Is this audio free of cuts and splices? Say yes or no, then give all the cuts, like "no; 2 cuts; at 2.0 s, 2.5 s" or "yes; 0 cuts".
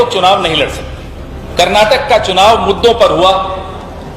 no; 1 cut; at 1.4 s